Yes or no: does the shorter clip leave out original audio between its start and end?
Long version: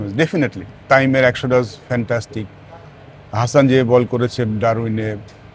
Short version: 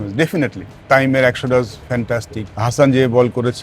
yes